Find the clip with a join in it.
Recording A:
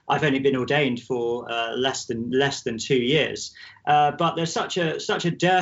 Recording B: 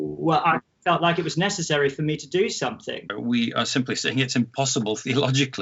B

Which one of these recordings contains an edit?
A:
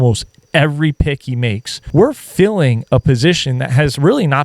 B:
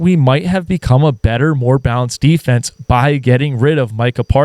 A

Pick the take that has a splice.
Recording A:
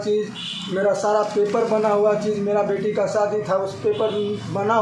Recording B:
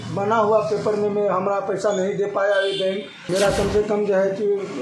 B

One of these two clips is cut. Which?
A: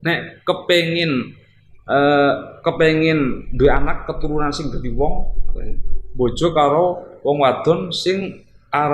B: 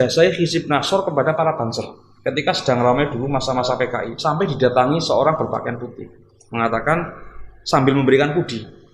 B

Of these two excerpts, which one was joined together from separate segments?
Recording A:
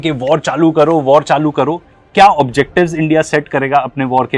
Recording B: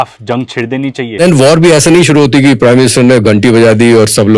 B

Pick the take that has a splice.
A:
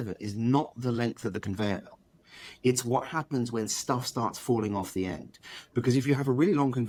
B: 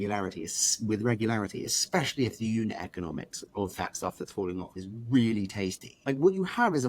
B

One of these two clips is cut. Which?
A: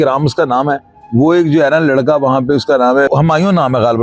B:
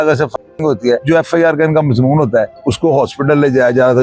B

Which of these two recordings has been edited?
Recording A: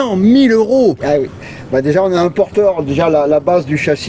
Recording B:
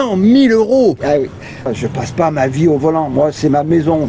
B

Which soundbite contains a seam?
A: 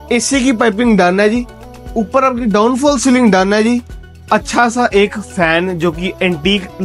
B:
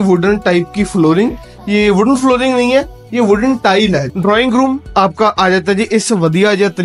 B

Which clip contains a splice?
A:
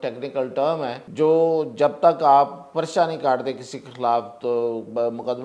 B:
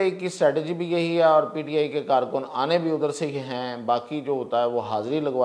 A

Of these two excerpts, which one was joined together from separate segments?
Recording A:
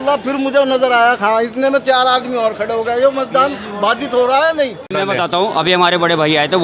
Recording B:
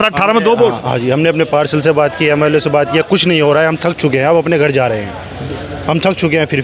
A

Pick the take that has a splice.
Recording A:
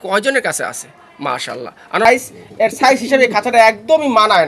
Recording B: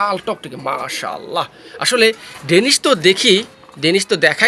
A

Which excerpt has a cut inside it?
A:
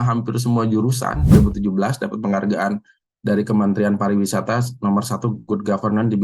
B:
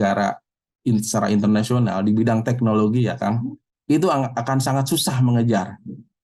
A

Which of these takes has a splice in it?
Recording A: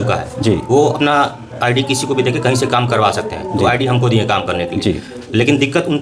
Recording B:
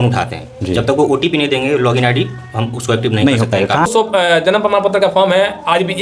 B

